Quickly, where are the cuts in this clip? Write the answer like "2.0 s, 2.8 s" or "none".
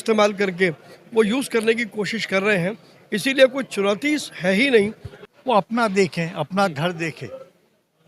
5.4 s